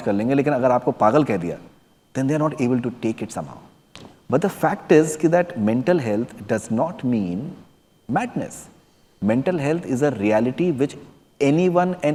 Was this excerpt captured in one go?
yes; 0 cuts

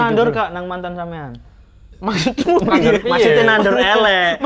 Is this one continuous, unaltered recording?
yes; 0 cuts

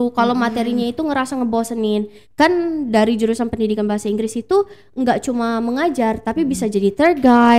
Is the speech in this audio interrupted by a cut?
yes; 1 cut; at 2.2 s

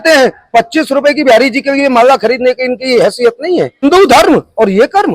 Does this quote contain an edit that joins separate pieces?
yes; 1 cut; at 3.8 s

